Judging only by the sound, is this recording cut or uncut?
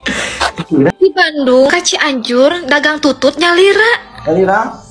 cut